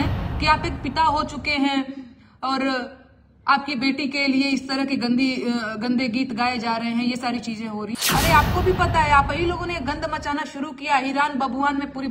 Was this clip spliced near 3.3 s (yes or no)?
no